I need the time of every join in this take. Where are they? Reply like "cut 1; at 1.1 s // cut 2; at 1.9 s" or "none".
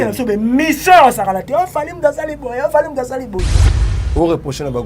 cut 1; at 3.5 s